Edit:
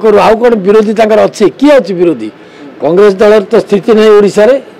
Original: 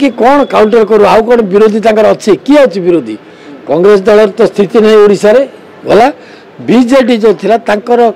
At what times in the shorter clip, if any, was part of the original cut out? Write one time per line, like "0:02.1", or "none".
none